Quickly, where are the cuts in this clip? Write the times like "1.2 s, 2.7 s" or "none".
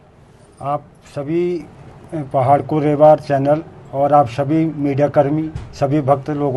none